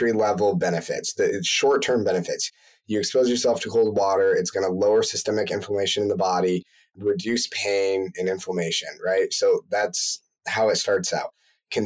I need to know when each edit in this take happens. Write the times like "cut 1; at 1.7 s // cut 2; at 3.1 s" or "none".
none

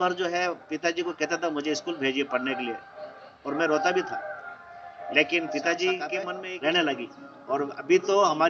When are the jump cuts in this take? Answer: cut 1; at 6.4 s

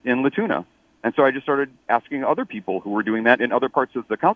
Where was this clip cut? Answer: none

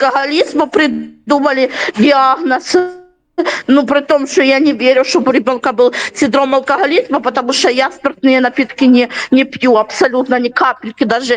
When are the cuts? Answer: none

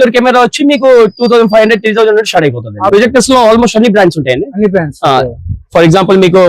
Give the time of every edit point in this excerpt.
cut 1; at 2.9 s

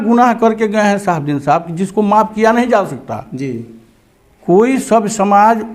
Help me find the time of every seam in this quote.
none

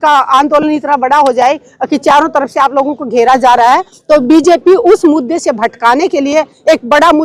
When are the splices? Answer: none

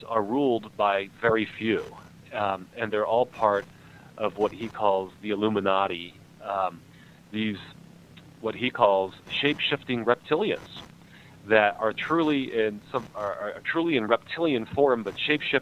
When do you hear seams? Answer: none

